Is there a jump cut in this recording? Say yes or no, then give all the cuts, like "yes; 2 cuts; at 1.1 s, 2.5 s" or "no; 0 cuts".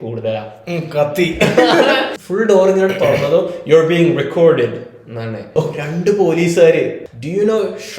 yes; 3 cuts; at 2.2 s, 5.6 s, 7.1 s